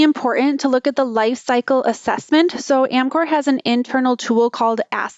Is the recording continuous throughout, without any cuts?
yes; 0 cuts

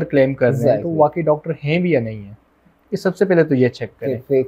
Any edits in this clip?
no; 0 cuts

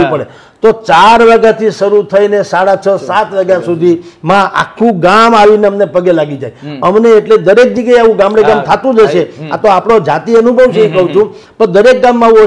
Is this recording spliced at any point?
no; 0 cuts

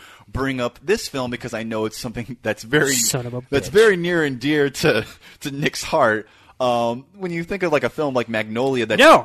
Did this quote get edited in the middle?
no; 0 cuts

